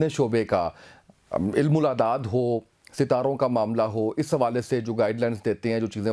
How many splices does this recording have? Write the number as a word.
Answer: zero